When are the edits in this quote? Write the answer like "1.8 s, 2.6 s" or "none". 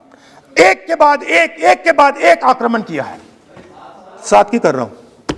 4.2 s

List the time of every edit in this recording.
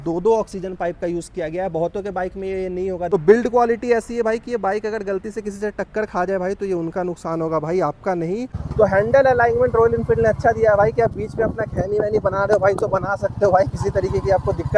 3.1 s, 8.5 s

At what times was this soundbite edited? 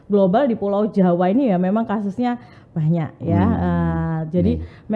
none

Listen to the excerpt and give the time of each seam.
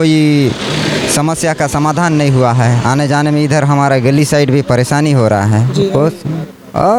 none

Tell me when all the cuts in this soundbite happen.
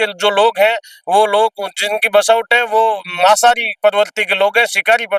none

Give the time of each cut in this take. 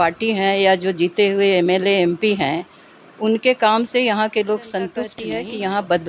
5.2 s

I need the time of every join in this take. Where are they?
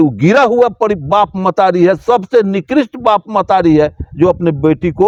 none

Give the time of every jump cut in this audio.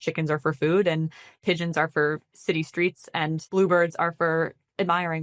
1.4 s, 3.4 s

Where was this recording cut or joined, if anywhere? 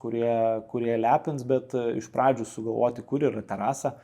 none

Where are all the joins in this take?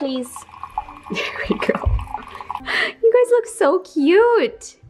2.6 s

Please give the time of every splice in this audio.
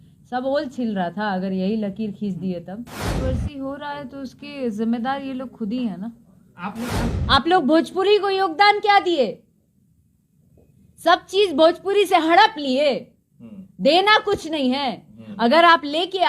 3.1 s, 7.1 s

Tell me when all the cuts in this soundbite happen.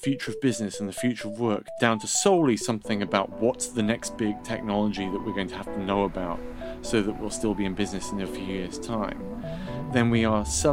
1.7 s

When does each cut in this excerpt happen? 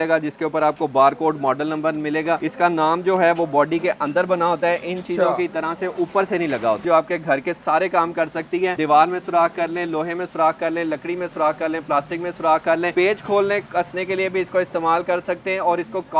6.8 s

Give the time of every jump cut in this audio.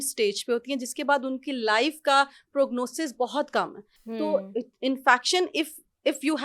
none

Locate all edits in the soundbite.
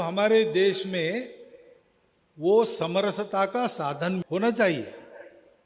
4.2 s

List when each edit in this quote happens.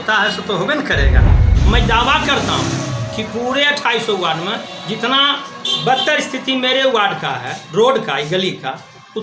1.5 s

